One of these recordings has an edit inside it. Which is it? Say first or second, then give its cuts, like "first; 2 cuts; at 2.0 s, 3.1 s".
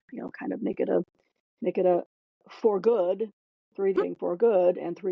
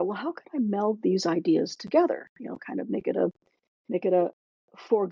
first; 1 cut; at 4.0 s